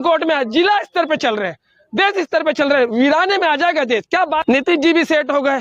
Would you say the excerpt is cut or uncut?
cut